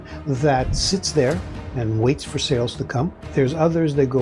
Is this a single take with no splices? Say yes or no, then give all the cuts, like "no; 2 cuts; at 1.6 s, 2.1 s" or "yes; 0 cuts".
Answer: no; 1 cut; at 3.2 s